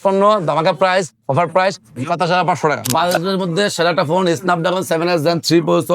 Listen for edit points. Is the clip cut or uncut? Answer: cut